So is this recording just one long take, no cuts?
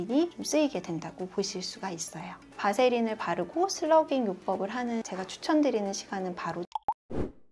no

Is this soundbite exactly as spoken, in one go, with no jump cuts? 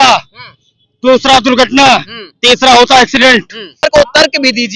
no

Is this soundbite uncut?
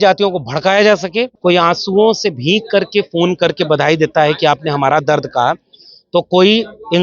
no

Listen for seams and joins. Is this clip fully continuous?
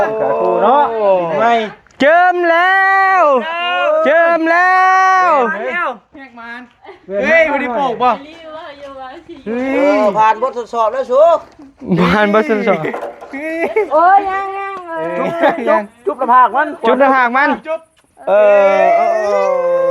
yes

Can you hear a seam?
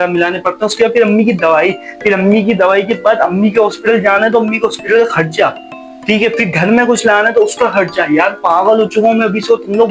no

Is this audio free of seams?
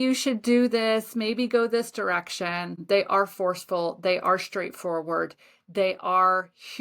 no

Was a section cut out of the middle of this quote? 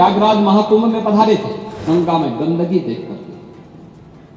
yes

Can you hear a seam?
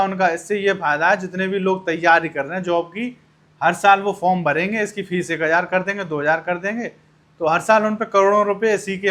no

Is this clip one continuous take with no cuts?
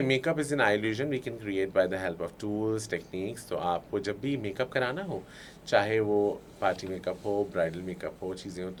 yes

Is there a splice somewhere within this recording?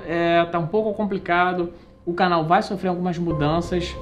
no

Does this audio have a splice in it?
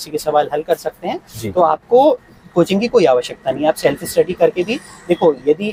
no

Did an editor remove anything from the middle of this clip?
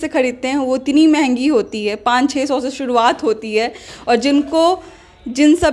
no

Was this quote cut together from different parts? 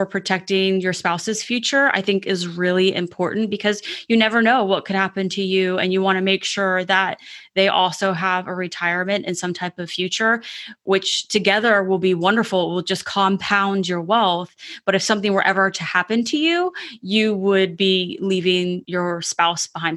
yes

